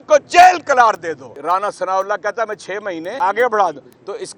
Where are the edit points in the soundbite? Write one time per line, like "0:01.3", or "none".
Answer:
0:01.3
0:03.1